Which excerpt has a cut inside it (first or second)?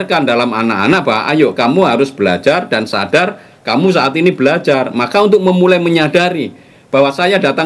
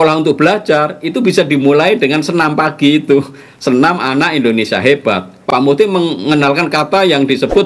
second